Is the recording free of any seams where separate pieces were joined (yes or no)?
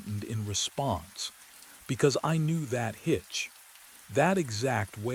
yes